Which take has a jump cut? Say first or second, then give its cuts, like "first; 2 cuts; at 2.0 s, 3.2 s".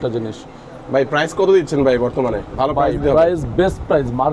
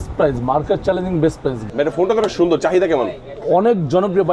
second; 1 cut; at 1.6 s